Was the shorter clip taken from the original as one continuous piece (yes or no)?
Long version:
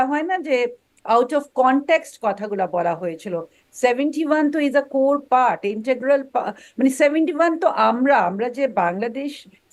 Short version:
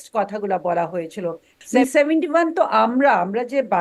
no